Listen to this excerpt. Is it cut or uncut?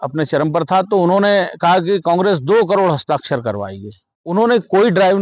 cut